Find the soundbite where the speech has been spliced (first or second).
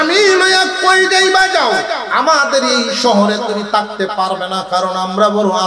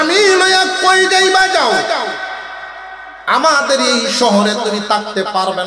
first